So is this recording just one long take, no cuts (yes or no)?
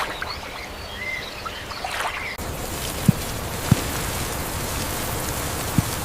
yes